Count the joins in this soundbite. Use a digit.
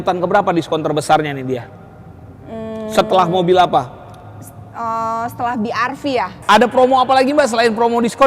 1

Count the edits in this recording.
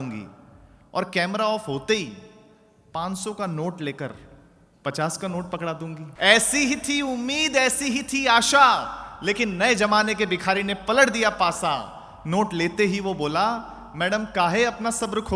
1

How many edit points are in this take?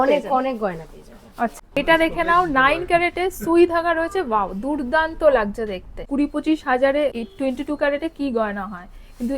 3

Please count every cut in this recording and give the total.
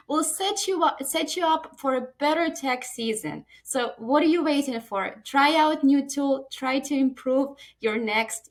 0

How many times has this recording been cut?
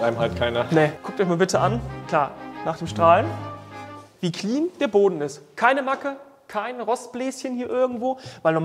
2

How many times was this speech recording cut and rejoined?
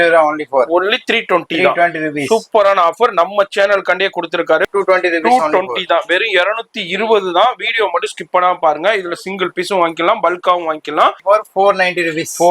2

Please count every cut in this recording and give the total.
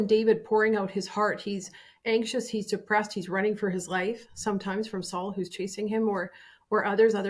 0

